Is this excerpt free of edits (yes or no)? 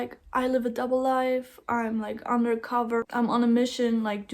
no